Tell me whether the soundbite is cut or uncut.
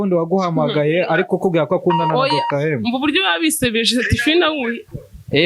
uncut